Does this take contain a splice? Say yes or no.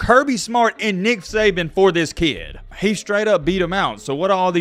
no